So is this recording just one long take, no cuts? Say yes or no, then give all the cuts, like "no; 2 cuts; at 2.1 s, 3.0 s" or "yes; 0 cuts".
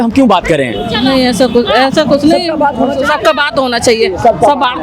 yes; 0 cuts